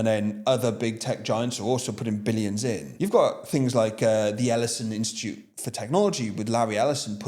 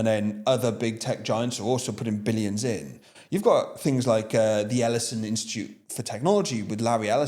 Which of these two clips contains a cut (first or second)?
first